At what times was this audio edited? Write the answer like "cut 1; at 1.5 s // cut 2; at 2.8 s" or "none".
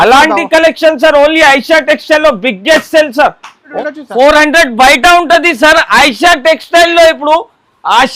cut 1; at 3.6 s